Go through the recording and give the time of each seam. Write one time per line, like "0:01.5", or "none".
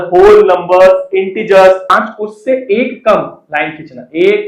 0:01.9